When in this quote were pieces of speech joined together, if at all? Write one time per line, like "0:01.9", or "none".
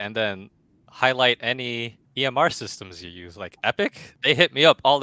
0:02.0
0:04.1

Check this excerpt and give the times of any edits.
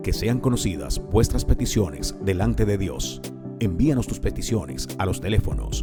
none

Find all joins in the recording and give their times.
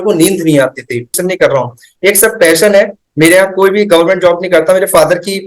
0:01.2

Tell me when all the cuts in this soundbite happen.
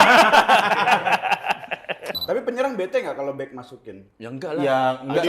0:02.1

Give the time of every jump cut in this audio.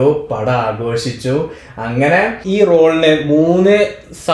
0:02.4

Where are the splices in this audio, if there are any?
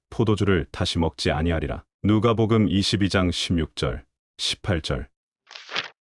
0:05.2

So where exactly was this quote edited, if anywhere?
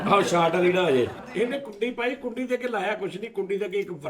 0:01.2

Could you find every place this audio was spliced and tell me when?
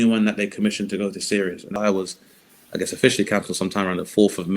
0:01.8

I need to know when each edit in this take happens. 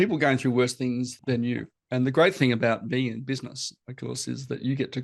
0:01.1

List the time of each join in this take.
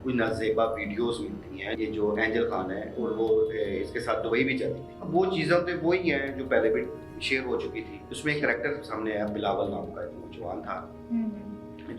0:01.7
0:04.9
0:08.0

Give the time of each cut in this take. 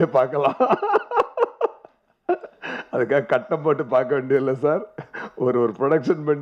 none

